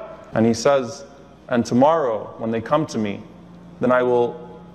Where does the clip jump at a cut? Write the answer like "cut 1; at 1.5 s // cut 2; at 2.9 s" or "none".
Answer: none